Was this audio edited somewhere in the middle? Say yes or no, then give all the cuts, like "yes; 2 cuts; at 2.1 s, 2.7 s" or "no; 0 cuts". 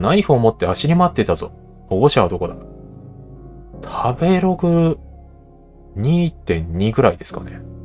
no; 0 cuts